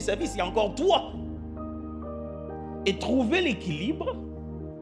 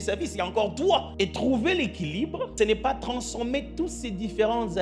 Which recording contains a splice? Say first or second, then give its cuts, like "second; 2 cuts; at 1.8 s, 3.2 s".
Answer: second; 2 cuts; at 1.1 s, 2.5 s